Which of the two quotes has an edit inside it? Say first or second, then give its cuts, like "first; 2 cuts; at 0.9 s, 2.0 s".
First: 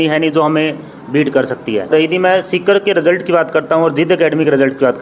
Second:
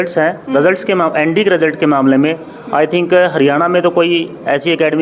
first; 1 cut; at 1.9 s